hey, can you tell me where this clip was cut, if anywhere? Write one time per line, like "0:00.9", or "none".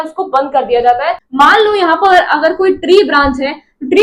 0:01.2